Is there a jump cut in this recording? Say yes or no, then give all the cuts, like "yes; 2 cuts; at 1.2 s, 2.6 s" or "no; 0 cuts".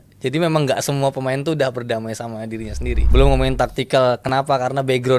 yes; 1 cut; at 3.1 s